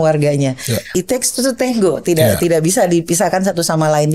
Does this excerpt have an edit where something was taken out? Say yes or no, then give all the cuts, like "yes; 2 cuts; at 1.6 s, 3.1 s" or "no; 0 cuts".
yes; 1 cut; at 0.9 s